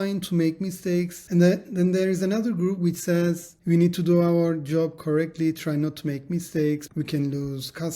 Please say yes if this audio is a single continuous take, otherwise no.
no